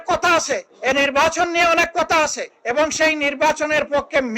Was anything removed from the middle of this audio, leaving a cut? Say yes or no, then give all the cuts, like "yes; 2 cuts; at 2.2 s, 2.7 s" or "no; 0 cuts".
no; 0 cuts